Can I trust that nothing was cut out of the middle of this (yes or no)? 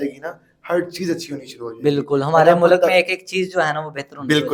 yes